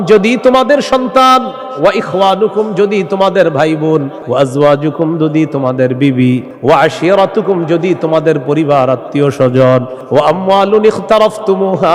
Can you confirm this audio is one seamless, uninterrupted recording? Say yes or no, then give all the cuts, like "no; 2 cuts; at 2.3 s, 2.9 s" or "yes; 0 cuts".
no; 3 cuts; at 4.2 s, 6.5 s, 10.0 s